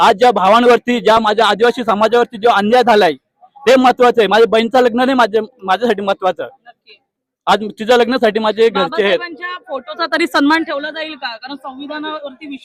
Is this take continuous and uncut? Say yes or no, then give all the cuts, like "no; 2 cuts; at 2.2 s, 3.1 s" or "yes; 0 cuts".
yes; 0 cuts